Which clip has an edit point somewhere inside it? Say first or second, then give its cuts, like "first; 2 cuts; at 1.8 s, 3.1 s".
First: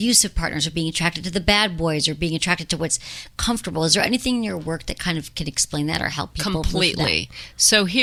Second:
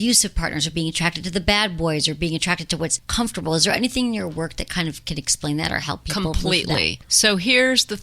second; 2 cuts; at 3.0 s, 7.0 s